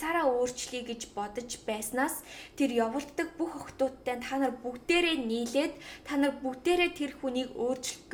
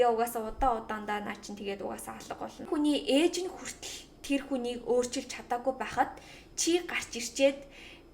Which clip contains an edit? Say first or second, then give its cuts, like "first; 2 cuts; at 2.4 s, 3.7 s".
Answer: second; 1 cut; at 2.7 s